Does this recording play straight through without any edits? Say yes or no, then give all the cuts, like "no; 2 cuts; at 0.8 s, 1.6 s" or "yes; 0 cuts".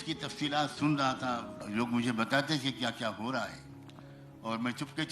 no; 1 cut; at 1.5 s